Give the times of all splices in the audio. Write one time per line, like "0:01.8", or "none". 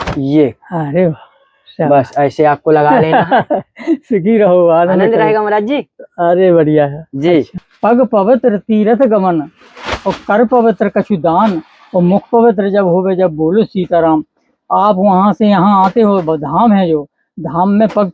0:07.6